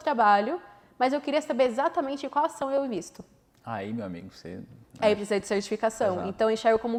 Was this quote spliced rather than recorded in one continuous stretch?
no; 0 cuts

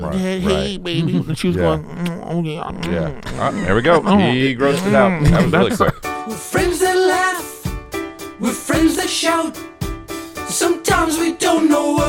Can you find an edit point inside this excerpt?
yes; 1 cut; at 6.0 s

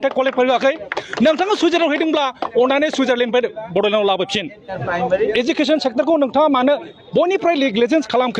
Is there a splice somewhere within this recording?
yes; 1 cut; at 4.7 s

